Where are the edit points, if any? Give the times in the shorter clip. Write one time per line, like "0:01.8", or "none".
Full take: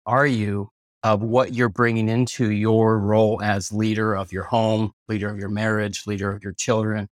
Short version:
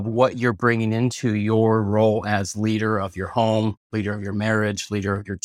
none